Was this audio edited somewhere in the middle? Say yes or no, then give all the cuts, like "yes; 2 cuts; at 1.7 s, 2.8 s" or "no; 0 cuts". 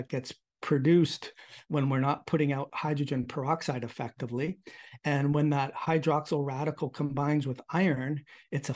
no; 0 cuts